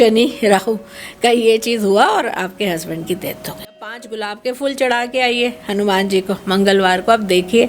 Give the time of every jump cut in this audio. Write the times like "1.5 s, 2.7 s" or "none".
3.7 s

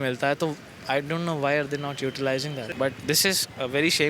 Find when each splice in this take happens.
2.7 s

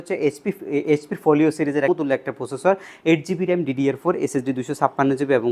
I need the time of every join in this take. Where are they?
1.9 s

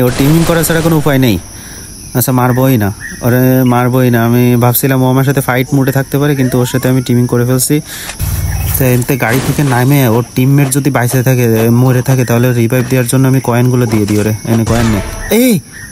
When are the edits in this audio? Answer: 8.1 s

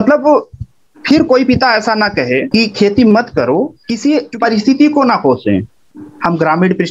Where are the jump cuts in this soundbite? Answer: 2.5 s, 3.8 s

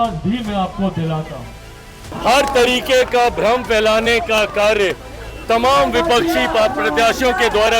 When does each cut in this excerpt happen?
2.0 s

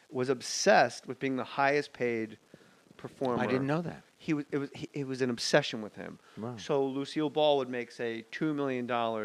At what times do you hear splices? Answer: 5.1 s

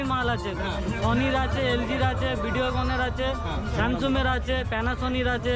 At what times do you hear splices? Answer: none

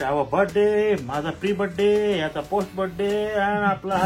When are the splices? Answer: none

